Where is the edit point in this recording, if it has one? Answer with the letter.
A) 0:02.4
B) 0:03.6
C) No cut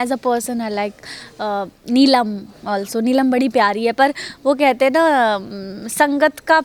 C